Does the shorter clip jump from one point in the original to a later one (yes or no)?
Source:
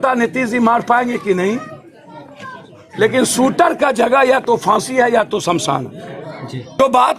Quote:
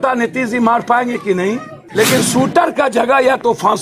yes